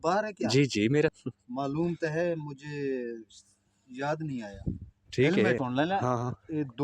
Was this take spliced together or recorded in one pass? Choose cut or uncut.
cut